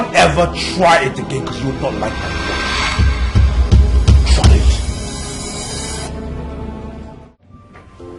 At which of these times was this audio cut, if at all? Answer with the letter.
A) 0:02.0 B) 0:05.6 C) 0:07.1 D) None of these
C